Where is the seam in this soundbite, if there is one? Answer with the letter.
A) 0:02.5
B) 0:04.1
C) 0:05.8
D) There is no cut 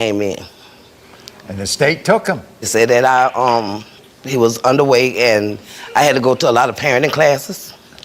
A